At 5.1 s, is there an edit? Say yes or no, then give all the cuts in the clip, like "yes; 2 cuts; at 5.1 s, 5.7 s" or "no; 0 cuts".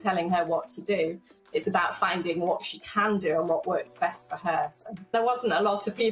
yes; 1 cut; at 5.1 s